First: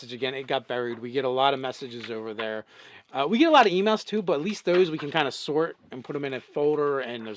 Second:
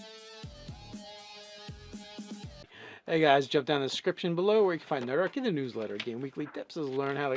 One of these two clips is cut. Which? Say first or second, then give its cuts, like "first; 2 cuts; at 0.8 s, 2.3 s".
second; 2 cuts; at 2.5 s, 6.4 s